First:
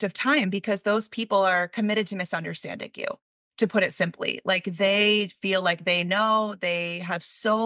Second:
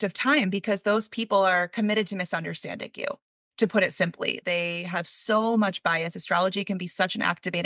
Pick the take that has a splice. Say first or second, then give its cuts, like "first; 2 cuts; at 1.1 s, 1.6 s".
second; 1 cut; at 4.4 s